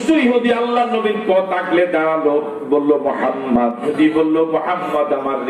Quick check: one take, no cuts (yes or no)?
no